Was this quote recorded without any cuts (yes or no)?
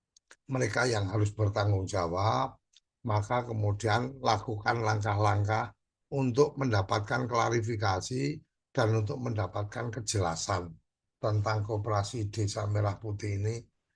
yes